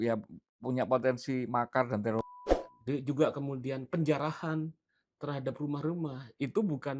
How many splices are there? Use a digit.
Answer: 1